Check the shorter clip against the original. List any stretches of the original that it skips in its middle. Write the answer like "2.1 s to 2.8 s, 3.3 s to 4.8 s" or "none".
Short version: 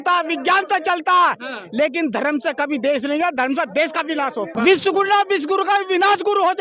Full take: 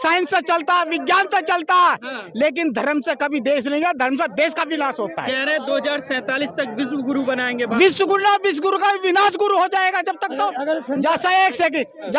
5.1 s to 7.7 s